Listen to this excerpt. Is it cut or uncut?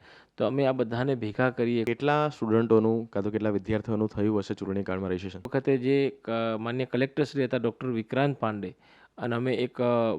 cut